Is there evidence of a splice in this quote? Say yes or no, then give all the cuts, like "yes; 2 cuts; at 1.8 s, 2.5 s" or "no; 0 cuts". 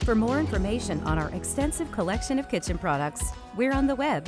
no; 0 cuts